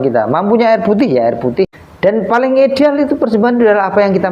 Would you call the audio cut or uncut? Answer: cut